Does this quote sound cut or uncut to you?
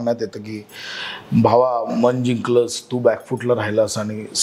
uncut